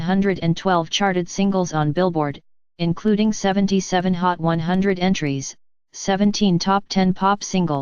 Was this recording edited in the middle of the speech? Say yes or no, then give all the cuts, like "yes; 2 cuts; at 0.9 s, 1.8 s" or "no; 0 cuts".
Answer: yes; 1 cut; at 6.0 s